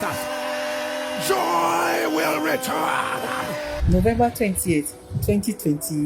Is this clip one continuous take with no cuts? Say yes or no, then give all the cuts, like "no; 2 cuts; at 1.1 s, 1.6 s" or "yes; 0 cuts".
no; 1 cut; at 3.7 s